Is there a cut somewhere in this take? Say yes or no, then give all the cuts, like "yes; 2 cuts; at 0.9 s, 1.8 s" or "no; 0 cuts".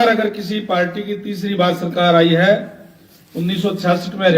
no; 0 cuts